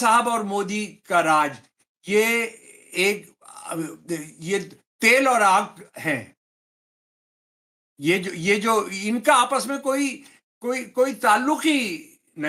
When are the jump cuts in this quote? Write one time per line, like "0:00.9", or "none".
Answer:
none